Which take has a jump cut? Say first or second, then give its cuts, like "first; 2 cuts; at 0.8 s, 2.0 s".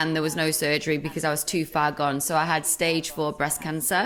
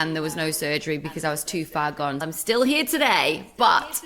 second; 1 cut; at 2.2 s